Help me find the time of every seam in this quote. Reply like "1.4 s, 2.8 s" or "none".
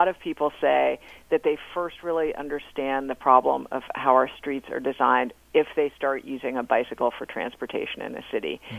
none